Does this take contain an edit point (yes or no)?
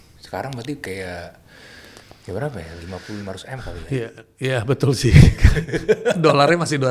no